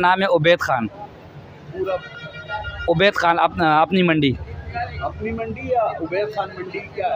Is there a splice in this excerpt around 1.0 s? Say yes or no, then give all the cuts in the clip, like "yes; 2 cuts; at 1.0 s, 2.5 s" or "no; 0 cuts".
no; 0 cuts